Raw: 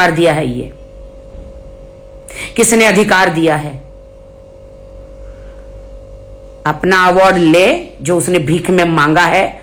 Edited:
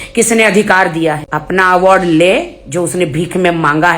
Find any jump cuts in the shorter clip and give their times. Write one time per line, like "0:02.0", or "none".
0:01.2